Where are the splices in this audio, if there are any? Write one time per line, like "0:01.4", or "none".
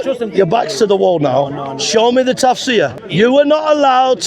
0:03.0